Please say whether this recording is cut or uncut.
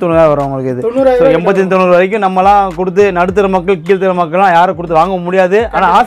uncut